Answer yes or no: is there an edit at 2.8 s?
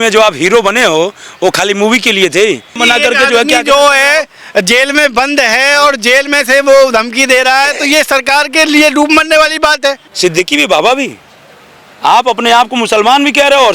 yes